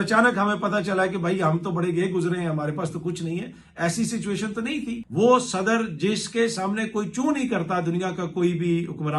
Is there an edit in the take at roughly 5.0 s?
yes; 1 cut; at 5.0 s

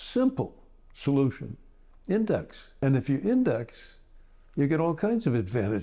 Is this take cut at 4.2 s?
no; 1 cut; at 2.6 s

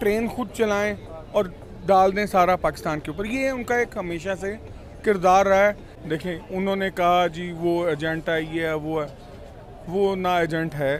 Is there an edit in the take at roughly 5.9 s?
yes; 1 cut; at 5.9 s

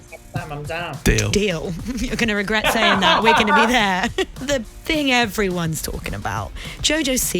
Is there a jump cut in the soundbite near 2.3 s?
no; 1 cut; at 4.4 s

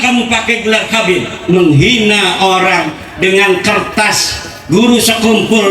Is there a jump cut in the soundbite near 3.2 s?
no; 1 cut; at 1.4 s

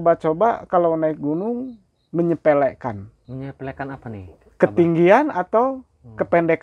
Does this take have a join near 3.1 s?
yes; 1 cut; at 3.1 s

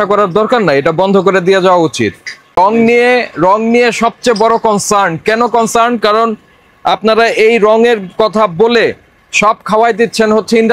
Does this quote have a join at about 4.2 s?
no; 1 cut; at 2.6 s

